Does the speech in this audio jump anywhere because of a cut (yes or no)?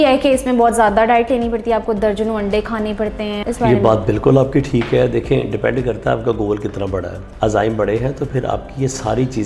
yes